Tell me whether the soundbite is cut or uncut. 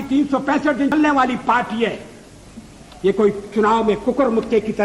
cut